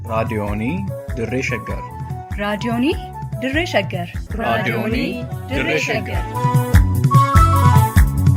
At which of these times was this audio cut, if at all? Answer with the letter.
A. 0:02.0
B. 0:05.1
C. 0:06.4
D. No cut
D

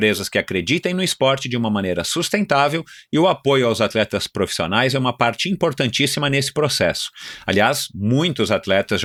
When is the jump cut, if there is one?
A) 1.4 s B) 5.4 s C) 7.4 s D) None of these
D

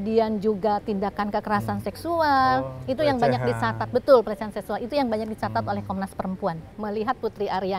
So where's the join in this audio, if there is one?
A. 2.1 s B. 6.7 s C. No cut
B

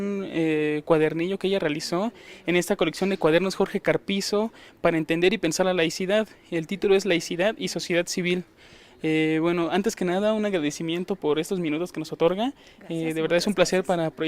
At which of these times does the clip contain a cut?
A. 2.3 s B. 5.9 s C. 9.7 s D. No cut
C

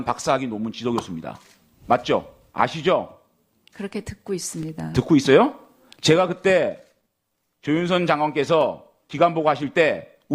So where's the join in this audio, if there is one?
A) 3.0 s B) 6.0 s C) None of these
A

